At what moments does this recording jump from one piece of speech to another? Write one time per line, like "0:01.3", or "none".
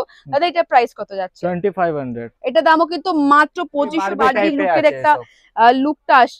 0:04.1